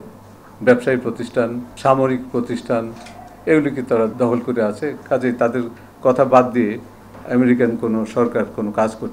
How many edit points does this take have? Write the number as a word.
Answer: two